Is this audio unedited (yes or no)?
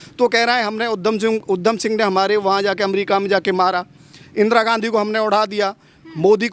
yes